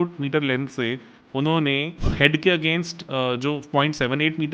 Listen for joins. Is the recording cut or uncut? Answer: cut